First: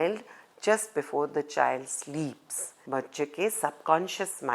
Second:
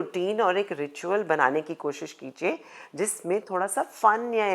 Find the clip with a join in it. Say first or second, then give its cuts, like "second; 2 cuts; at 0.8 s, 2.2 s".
first; 1 cut; at 2.7 s